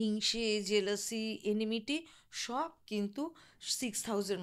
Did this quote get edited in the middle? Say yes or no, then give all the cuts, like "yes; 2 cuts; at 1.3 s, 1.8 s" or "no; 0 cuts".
no; 0 cuts